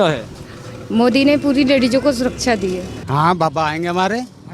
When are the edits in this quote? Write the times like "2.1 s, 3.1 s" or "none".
3.0 s